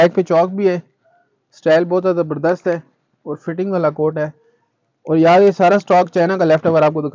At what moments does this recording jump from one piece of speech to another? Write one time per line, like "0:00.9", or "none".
none